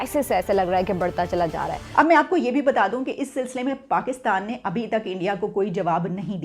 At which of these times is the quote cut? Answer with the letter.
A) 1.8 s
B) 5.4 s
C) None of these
A